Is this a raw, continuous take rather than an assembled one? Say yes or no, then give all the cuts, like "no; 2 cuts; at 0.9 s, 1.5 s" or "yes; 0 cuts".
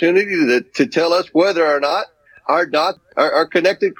no; 1 cut; at 3.0 s